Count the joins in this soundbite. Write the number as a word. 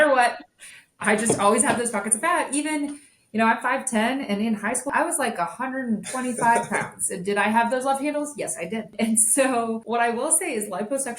three